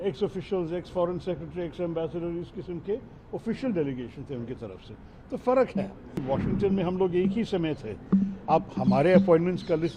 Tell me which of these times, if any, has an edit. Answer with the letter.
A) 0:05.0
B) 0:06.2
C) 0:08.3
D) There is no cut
B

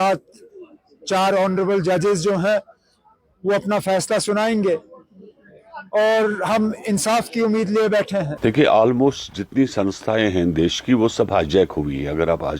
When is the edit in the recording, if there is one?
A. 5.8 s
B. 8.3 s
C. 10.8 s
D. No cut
D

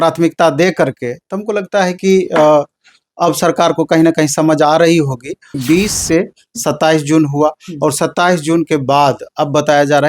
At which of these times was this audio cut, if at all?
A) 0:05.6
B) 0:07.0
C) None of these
A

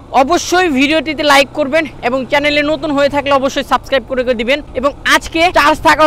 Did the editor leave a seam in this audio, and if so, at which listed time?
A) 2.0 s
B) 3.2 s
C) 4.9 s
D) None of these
C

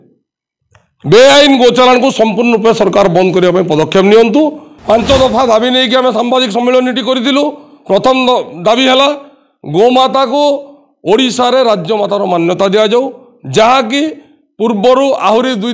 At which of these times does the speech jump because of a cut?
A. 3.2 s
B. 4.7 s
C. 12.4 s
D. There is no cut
B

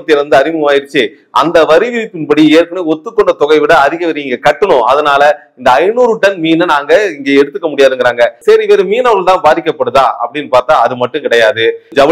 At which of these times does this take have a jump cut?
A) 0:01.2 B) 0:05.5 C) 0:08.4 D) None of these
C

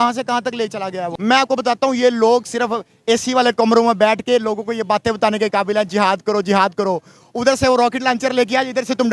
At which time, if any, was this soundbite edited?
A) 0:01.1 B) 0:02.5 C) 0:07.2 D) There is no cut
A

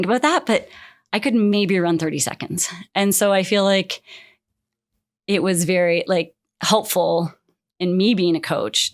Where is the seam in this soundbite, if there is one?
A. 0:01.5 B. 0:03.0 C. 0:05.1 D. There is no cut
D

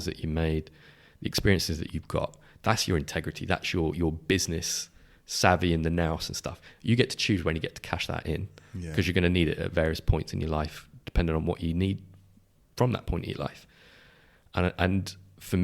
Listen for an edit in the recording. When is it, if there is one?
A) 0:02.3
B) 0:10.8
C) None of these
C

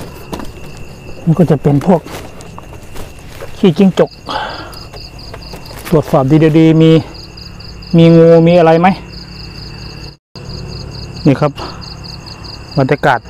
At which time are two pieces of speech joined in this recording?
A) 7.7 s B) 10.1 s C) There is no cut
B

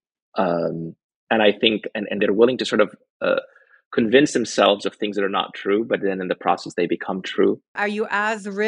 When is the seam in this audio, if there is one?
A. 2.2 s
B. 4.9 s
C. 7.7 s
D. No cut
C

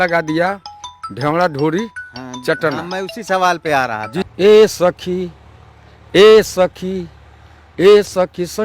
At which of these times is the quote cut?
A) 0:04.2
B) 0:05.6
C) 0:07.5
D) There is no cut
A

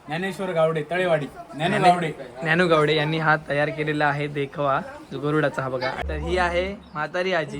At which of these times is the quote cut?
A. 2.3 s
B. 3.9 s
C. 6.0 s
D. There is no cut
C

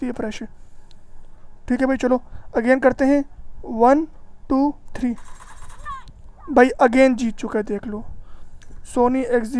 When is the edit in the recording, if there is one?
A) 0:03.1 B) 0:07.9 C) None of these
C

